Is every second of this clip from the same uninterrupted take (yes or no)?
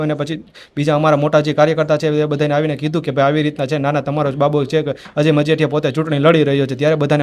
yes